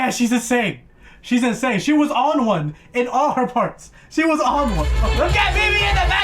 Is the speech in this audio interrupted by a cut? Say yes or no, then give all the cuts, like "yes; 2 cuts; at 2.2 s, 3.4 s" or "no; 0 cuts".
yes; 1 cut; at 5.0 s